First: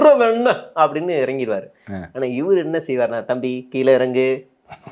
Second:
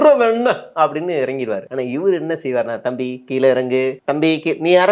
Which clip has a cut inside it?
second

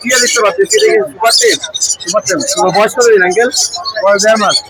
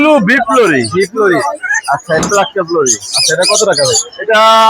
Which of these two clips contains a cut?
second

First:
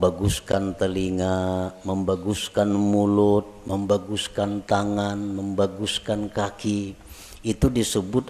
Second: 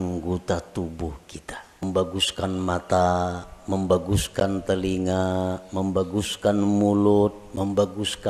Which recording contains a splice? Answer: second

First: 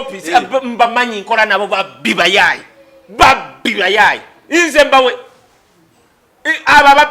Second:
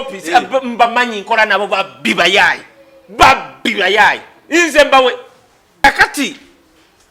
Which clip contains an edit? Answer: second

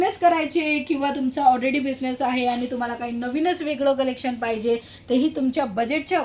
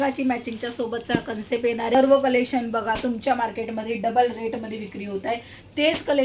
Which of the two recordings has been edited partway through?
second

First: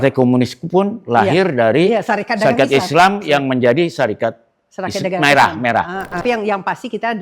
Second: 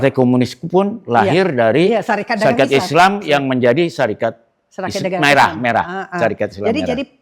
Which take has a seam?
first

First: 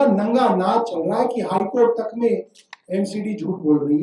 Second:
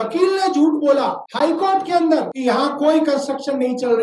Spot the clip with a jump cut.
second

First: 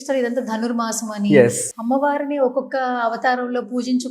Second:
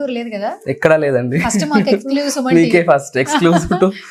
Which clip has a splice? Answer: first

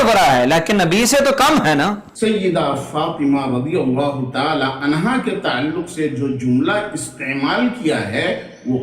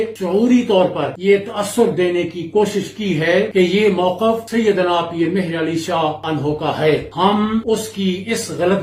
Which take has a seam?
first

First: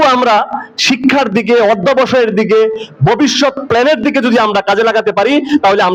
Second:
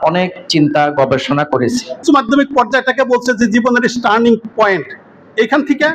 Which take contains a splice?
second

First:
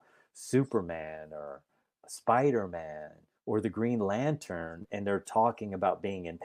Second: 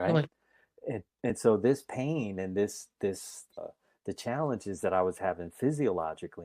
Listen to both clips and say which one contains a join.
second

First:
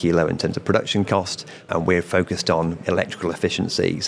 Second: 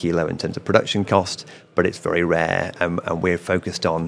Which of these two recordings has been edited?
first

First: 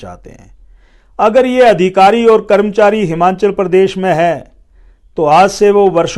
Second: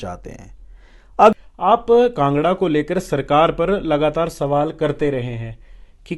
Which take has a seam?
second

